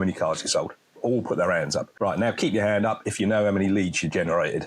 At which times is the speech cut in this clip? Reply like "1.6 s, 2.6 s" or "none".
1.9 s

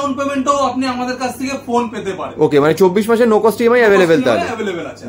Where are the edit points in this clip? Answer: none

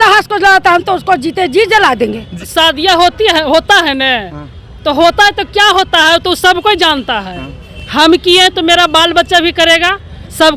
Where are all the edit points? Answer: 2.4 s

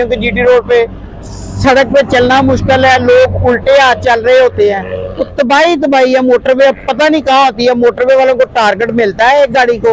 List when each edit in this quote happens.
none

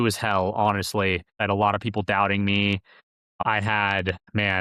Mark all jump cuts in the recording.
1.4 s, 3.4 s

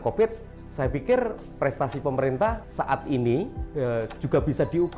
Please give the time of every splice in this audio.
1.4 s, 2.6 s, 3.6 s

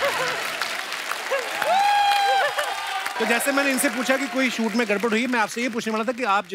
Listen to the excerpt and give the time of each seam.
3.1 s

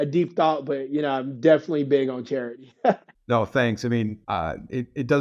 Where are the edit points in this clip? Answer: 3.1 s, 4.2 s

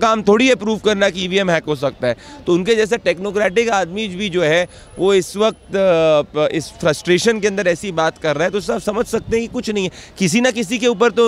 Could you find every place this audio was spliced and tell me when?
none

